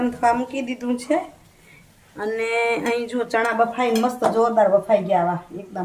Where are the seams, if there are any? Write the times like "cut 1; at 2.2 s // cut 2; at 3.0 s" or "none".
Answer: none